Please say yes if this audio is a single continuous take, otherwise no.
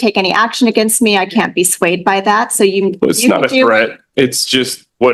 yes